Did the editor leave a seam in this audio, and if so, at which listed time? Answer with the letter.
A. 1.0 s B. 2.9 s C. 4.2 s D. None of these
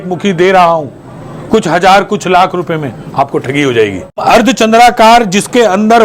C